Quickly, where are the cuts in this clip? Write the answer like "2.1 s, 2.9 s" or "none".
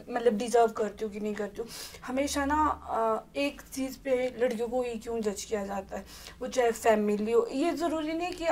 none